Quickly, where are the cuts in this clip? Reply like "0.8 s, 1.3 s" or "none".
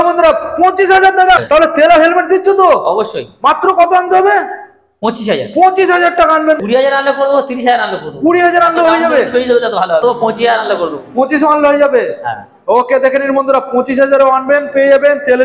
1.4 s, 6.6 s, 10.0 s